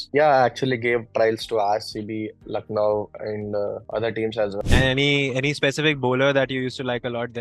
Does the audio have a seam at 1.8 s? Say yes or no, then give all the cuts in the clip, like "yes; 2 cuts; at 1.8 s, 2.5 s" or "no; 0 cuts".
no; 1 cut; at 4.5 s